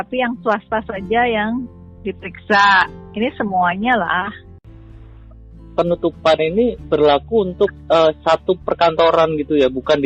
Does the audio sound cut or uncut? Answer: cut